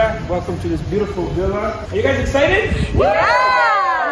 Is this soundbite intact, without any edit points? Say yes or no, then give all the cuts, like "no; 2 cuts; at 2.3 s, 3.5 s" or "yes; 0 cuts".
no; 1 cut; at 1.8 s